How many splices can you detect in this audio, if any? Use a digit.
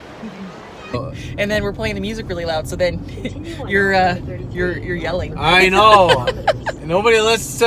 1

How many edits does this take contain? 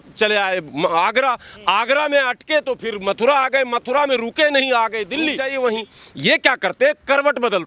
1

